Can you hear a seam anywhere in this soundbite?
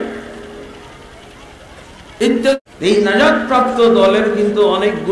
yes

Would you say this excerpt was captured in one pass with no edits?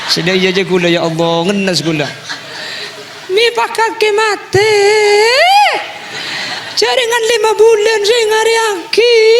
yes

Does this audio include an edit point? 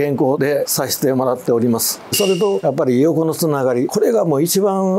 yes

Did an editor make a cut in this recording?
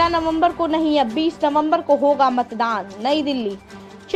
no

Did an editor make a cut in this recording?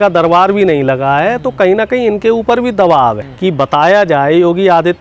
yes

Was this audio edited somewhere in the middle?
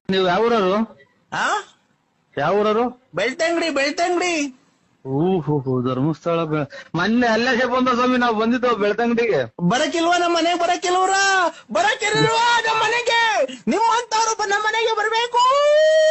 no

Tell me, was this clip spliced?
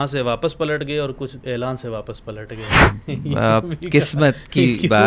no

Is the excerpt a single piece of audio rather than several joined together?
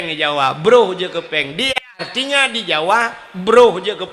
no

